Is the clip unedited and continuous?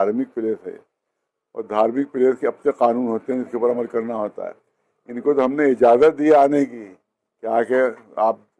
yes; 0 cuts

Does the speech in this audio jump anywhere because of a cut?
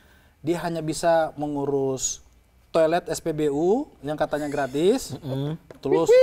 no; 0 cuts

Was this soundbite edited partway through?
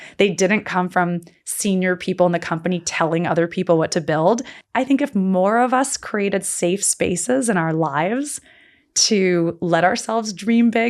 yes; 1 cut; at 4.5 s

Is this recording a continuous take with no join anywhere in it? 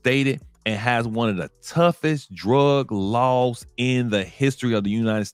yes; 0 cuts

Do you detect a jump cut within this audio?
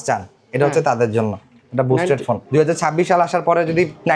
yes; 1 cut; at 2.4 s

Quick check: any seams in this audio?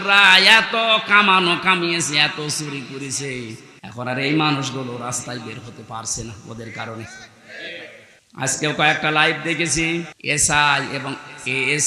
yes; 3 cuts; at 3.7 s, 8.1 s, 10.2 s

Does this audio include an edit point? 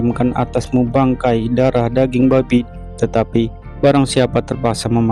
yes; 1 cut; at 2.6 s

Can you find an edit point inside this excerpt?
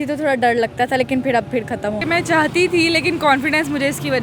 yes; 1 cut; at 2.0 s

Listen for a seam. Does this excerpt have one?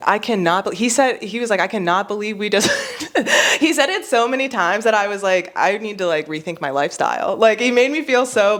no; 0 cuts

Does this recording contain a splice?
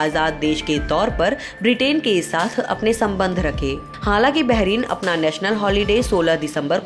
yes; 1 cut; at 3.9 s

